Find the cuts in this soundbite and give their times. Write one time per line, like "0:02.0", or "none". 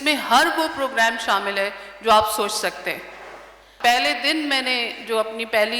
0:03.7